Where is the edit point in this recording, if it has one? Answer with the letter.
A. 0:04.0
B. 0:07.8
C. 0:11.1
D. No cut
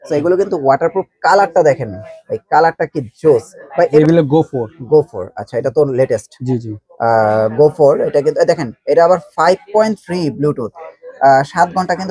A